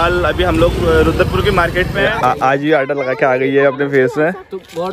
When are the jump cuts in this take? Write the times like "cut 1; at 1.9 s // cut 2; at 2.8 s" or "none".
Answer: cut 1; at 2.6 s